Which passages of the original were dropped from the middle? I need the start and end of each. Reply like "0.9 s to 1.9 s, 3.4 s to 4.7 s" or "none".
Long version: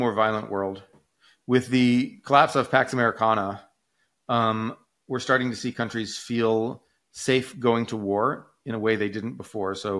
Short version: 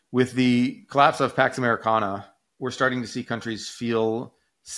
3.8 s to 4.9 s